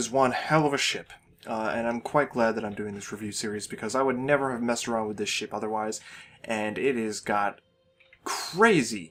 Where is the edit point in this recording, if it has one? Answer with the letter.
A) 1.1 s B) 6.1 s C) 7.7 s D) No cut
D